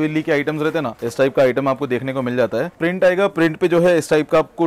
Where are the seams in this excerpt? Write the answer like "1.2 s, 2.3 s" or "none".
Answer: 1.0 s, 2.7 s

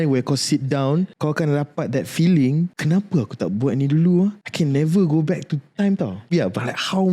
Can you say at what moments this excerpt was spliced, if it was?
1.1 s, 2.8 s, 4.4 s, 6.3 s

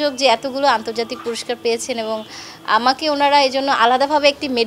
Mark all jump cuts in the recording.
none

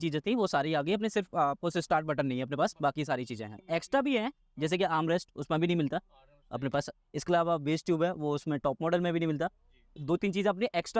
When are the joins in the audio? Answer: 3.5 s, 9.9 s

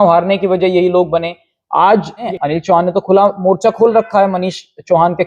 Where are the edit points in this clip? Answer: 2.2 s

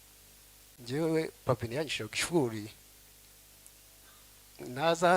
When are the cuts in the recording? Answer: 1.0 s

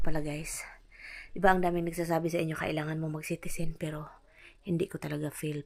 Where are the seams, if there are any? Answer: none

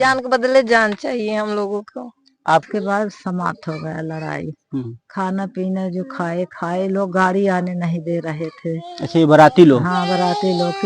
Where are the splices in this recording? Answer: 2.6 s

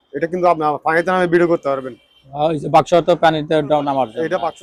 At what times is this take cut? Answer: none

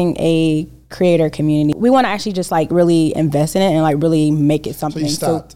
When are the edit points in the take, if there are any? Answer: 1.7 s

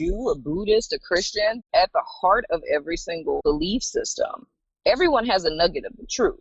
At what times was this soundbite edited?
1.6 s, 3.4 s

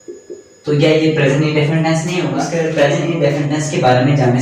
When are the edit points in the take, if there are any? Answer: 2.4 s

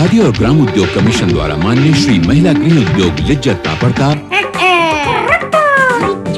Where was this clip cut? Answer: none

